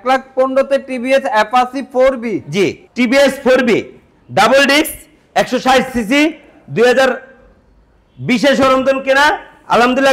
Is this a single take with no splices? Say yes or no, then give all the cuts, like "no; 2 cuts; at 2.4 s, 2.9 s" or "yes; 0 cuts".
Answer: yes; 0 cuts